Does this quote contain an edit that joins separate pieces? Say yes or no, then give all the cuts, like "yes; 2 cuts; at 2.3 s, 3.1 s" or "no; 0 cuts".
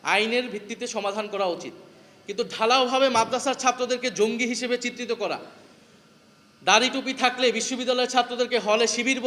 no; 0 cuts